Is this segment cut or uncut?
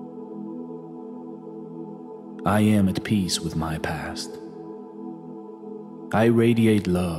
uncut